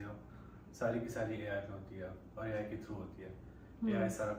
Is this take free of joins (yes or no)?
yes